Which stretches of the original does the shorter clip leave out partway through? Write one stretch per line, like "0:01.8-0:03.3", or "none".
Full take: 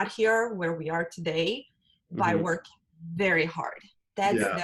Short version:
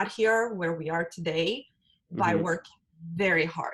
none